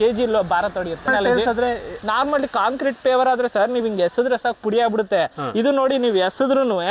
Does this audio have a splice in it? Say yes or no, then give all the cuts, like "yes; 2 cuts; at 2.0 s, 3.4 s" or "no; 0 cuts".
yes; 1 cut; at 1.1 s